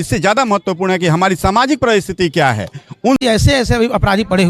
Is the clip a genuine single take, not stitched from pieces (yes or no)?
no